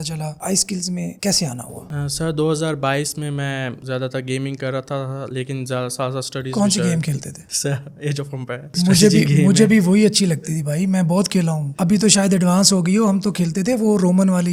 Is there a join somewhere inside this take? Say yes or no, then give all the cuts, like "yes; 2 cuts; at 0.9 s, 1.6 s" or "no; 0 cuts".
no; 0 cuts